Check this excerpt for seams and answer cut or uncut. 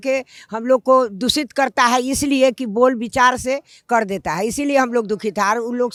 uncut